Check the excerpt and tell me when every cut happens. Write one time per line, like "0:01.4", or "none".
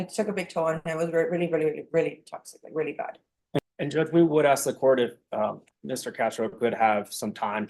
0:03.6